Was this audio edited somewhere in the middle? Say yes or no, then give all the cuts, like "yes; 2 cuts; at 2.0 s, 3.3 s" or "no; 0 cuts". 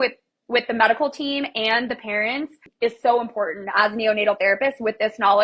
yes; 1 cut; at 2.6 s